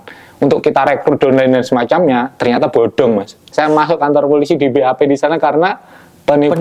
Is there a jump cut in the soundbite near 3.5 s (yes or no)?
yes